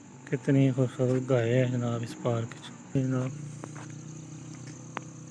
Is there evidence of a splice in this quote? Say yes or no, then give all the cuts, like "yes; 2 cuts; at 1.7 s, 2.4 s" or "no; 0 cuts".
yes; 1 cut; at 3.0 s